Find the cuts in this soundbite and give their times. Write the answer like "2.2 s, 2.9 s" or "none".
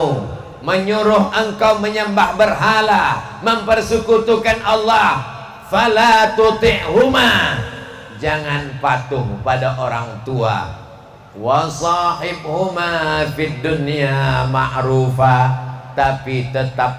none